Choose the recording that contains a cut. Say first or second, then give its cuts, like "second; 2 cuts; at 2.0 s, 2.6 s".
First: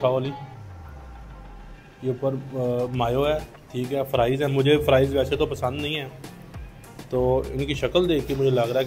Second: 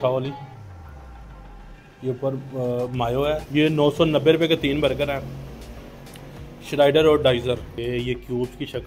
second; 2 cuts; at 3.4 s, 7.7 s